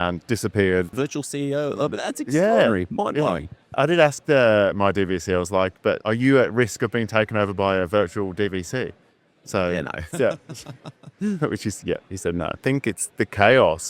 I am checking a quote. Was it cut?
yes; 3 cuts; at 0.9 s, 3.8 s, 12.6 s

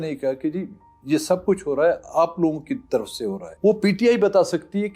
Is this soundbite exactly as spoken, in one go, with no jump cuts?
no; 1 cut; at 3.4 s

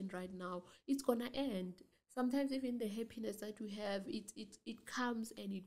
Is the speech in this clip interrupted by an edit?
no; 0 cuts

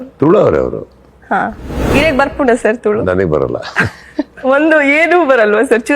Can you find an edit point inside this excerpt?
yes; 1 cut; at 4.3 s

